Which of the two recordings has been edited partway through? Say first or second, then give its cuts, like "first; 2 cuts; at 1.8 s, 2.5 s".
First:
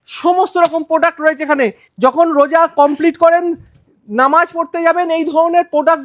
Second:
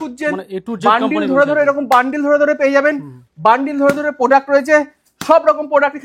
first; 1 cut; at 1.8 s